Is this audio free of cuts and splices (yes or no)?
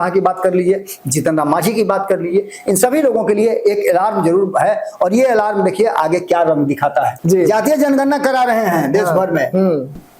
no